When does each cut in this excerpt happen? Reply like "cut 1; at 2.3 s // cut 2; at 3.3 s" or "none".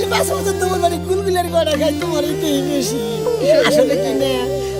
none